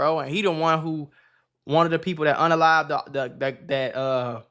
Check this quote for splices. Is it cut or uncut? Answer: uncut